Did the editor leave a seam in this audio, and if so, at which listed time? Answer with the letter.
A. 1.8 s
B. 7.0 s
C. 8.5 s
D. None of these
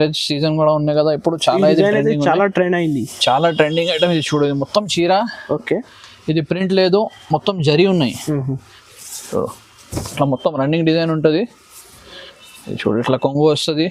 D